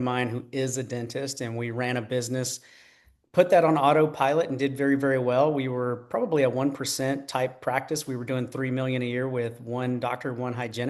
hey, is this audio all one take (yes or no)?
yes